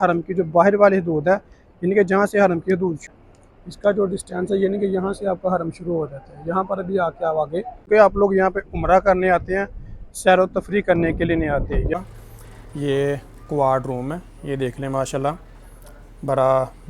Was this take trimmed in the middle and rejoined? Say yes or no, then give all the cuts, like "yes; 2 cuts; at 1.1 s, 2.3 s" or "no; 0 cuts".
yes; 3 cuts; at 3.0 s, 7.8 s, 12.0 s